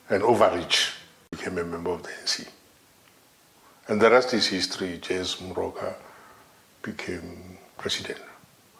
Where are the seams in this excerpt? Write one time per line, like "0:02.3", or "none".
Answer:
0:01.3